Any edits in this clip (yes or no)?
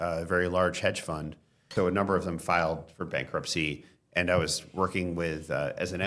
yes